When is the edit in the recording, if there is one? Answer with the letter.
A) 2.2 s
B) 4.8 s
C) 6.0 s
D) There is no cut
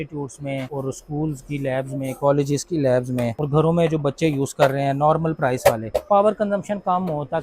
C